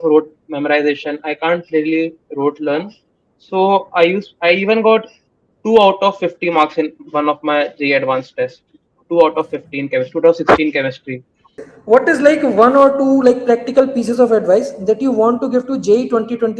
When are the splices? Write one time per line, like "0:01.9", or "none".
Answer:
0:11.6